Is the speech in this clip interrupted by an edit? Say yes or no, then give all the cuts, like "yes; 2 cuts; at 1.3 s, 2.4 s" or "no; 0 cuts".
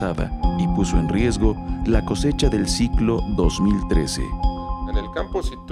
yes; 1 cut; at 3.8 s